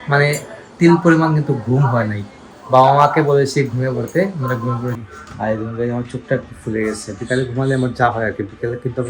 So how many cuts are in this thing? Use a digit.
1